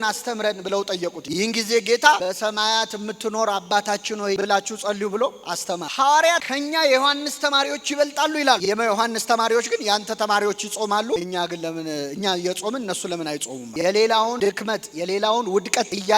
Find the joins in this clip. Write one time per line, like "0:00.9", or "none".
none